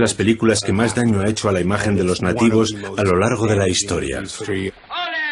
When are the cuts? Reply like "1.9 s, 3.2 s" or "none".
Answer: 4.4 s